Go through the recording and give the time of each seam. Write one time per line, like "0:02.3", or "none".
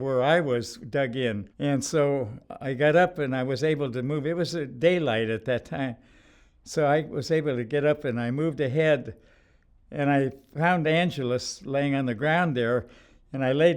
0:01.5